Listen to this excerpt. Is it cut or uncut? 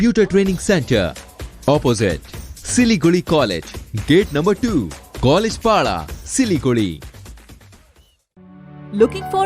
uncut